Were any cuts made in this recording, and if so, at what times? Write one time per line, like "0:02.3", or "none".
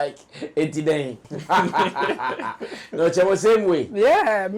0:01.3